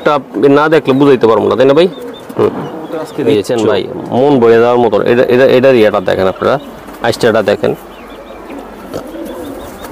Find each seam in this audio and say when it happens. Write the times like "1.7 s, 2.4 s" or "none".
3.6 s